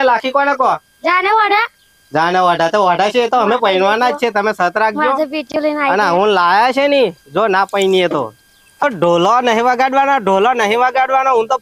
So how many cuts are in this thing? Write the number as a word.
one